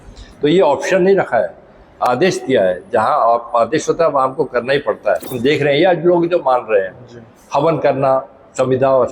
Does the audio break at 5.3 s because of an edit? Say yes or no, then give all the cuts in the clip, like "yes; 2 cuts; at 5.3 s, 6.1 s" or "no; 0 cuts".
yes; 1 cut; at 5.3 s